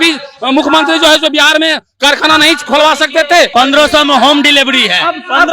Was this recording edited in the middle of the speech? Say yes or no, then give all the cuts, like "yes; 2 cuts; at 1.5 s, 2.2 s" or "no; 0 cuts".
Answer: yes; 1 cut; at 3.5 s